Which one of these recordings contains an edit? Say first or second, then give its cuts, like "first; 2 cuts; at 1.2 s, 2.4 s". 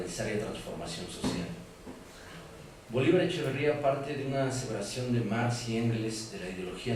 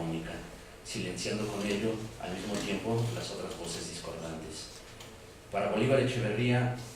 second; 1 cut; at 1.7 s